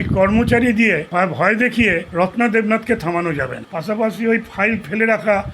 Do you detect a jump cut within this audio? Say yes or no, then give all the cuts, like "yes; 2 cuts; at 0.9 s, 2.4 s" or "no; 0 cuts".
yes; 3 cuts; at 1.1 s, 2.1 s, 3.6 s